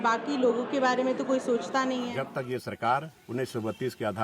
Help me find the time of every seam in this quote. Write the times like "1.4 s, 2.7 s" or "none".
2.2 s, 3.2 s